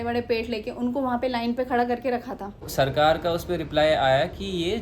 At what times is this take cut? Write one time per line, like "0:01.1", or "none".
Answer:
0:02.6